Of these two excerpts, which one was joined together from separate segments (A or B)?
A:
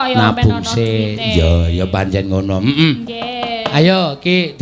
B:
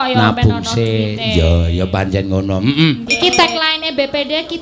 B